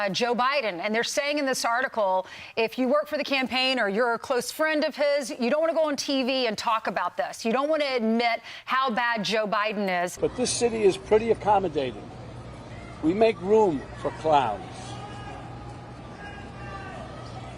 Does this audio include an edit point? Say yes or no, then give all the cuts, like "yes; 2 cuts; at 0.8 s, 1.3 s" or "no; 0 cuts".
yes; 1 cut; at 10.1 s